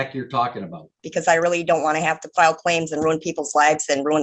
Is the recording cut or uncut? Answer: cut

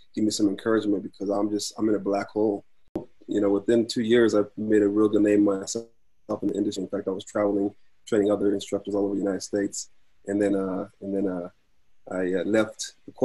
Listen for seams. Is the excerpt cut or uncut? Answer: cut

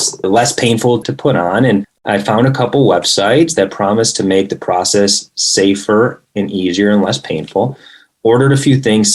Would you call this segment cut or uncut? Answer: cut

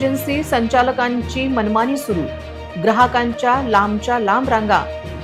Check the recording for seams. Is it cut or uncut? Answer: uncut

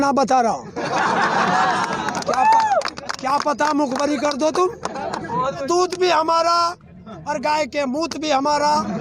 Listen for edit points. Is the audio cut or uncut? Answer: cut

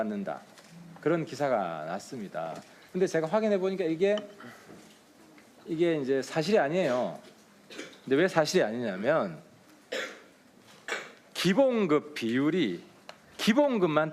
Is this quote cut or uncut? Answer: cut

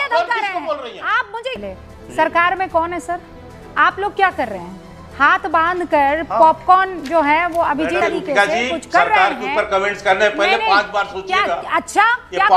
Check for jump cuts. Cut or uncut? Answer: cut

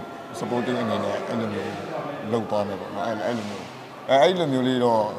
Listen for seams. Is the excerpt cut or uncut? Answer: uncut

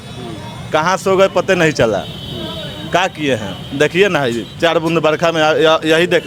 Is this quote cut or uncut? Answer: uncut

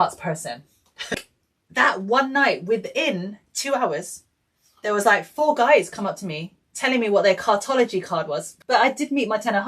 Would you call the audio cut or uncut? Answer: cut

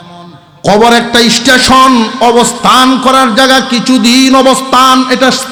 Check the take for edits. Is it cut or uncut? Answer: uncut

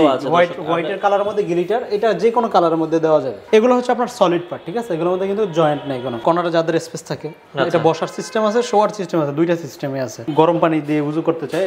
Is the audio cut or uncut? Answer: cut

